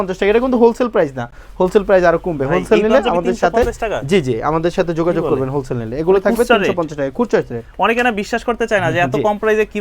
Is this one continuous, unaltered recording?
yes; 0 cuts

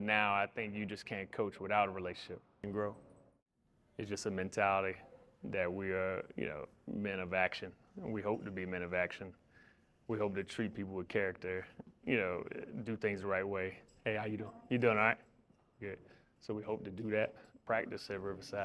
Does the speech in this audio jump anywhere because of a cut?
yes; 2 cuts; at 2.6 s, 17.6 s

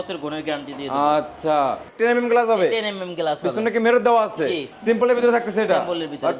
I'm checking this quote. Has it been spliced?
yes; 2 cuts; at 1.9 s, 4.7 s

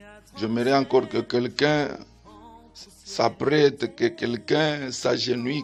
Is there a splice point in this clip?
no; 0 cuts

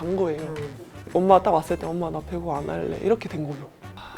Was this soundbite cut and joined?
yes; 1 cut; at 1.0 s

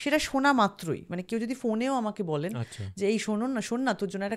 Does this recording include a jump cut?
no; 0 cuts

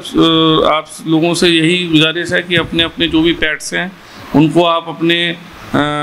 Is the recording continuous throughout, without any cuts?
yes; 0 cuts

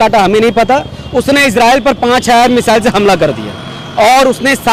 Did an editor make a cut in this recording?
no; 0 cuts

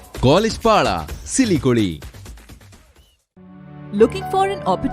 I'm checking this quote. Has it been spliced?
no; 0 cuts

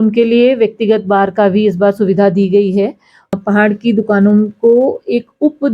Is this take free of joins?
no; 1 cut; at 3.3 s

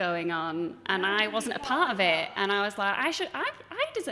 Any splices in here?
no; 0 cuts

